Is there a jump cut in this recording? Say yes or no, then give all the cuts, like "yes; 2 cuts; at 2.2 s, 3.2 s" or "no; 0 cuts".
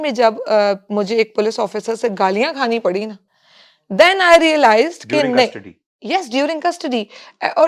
no; 0 cuts